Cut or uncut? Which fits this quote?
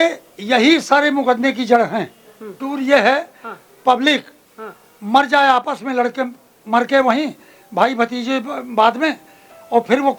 cut